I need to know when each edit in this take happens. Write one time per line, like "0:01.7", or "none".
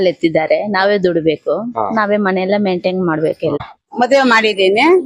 0:03.8